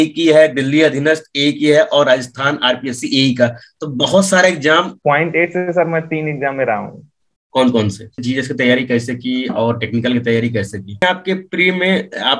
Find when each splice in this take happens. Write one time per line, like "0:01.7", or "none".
0:04.9
0:08.2
0:11.0